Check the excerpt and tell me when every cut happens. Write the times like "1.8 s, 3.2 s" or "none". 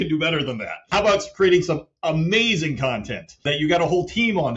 0.9 s, 3.5 s